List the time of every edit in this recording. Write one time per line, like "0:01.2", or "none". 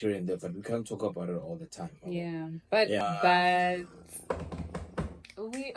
0:03.0